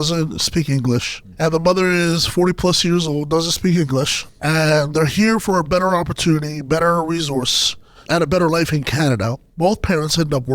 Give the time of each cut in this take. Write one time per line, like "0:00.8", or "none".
0:01.2
0:04.2
0:08.0
0:09.4